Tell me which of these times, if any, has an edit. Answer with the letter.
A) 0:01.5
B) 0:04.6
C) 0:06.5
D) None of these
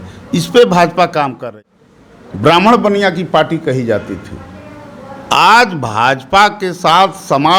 A